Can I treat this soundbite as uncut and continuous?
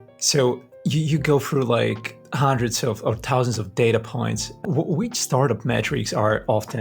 no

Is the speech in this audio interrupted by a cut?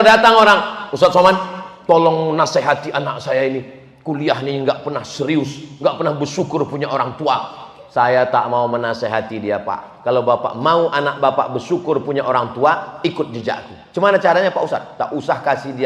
no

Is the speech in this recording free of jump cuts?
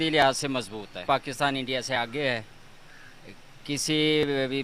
no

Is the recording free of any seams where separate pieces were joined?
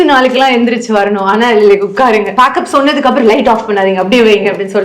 no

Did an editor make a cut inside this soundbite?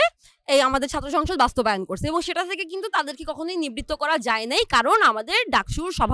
no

